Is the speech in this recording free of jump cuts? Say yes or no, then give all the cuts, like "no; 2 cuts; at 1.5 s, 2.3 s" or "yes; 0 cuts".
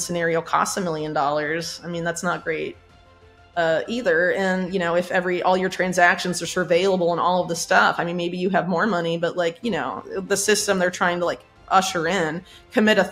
yes; 0 cuts